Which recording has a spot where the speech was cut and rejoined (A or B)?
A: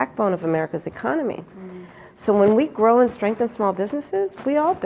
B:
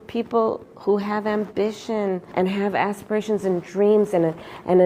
B